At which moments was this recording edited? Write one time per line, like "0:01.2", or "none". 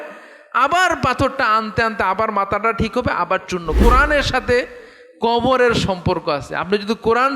0:03.7

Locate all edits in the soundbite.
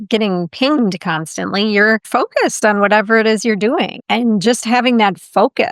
0:02.1
0:04.0

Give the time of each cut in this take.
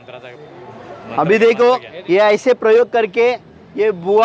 0:01.9

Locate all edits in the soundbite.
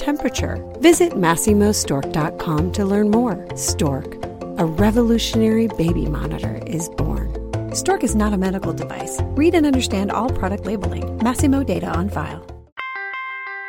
0:12.6

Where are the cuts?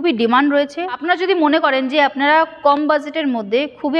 0:01.0

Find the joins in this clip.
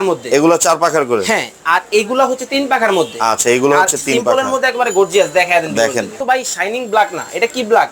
0:06.1

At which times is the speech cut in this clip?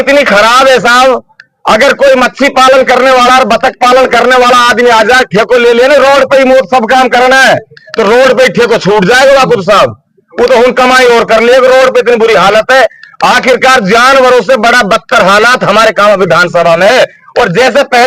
none

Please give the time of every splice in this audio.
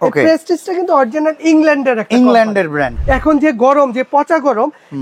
0:02.9

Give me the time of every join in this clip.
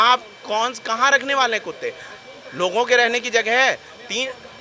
none

